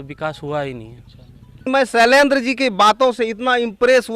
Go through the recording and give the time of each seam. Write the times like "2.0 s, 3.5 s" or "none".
1.7 s